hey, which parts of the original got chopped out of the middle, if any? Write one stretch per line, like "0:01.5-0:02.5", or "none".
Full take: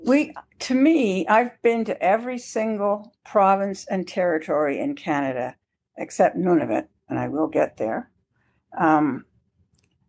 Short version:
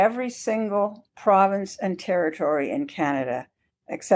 none